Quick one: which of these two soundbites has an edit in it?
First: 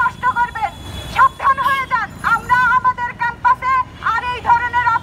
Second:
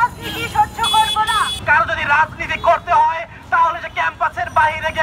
second; 1 cut; at 1.6 s

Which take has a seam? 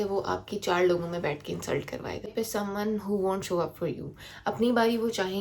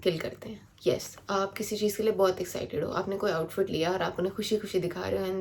first; 1 cut; at 2.3 s

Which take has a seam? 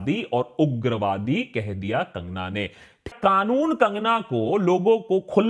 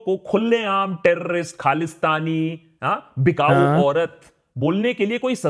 first; 1 cut; at 3.1 s

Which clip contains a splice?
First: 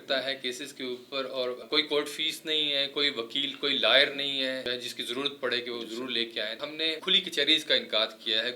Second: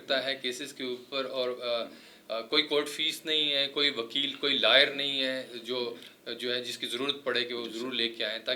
first; 3 cuts; at 1.6 s, 4.7 s, 6.6 s

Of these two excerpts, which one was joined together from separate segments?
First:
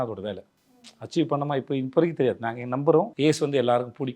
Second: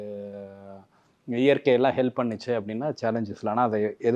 first; 1 cut; at 3.1 s

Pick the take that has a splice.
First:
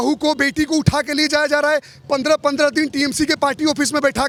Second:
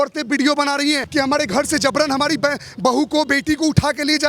second; 1 cut; at 1.0 s

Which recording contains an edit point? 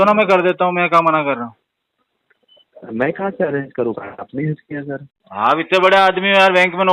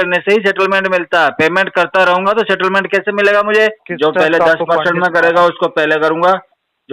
second; 1 cut; at 3.8 s

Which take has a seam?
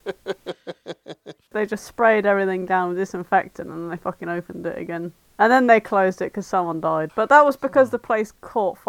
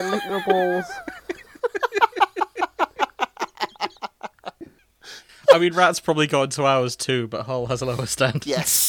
first; 2 cuts; at 1.0 s, 5.2 s

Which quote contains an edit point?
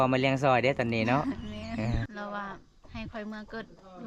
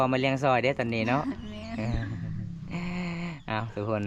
first; 1 cut; at 2.1 s

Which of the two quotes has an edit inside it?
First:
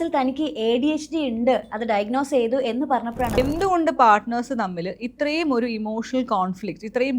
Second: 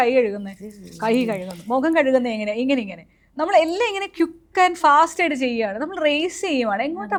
first; 1 cut; at 3.4 s

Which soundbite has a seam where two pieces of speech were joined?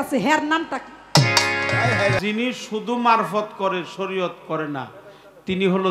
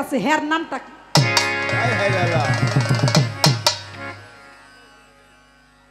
first; 1 cut; at 2.2 s

